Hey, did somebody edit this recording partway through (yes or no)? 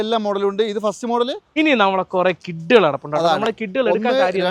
yes